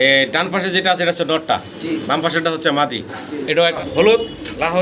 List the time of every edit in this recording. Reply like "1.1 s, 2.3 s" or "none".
3.8 s